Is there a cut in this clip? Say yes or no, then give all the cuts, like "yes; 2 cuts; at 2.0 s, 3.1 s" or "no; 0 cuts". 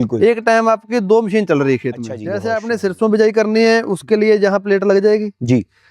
yes; 1 cut; at 2.3 s